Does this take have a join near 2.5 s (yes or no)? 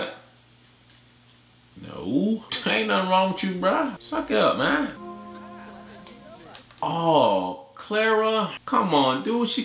yes